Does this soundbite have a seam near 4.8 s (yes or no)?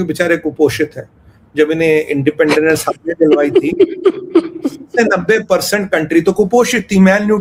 no